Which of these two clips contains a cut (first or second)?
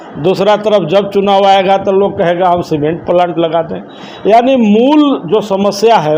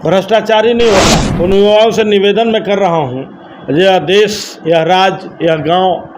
second